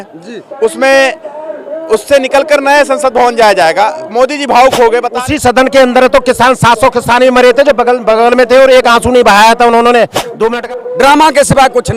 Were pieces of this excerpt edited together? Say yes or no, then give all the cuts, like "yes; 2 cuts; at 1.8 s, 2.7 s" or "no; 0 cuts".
yes; 2 cuts; at 5.1 s, 10.5 s